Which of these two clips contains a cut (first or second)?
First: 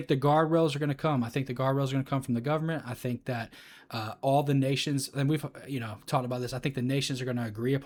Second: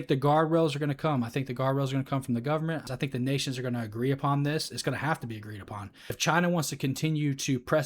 second